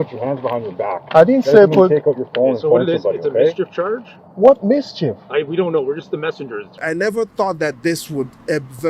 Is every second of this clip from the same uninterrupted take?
no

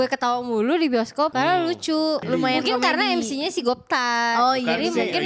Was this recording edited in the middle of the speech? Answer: yes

